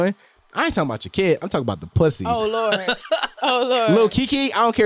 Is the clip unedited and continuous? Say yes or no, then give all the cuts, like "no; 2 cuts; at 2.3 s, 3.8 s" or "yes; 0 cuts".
yes; 0 cuts